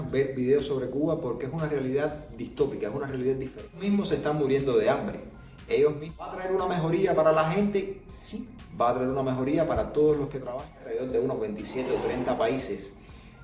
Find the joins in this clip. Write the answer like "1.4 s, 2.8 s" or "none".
3.8 s, 6.4 s, 10.9 s